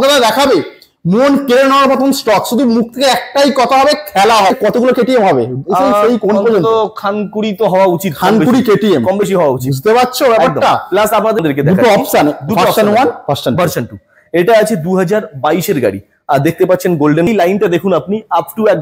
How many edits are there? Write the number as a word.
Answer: three